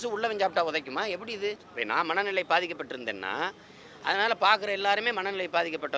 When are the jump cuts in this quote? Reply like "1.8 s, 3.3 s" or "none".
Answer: 1.7 s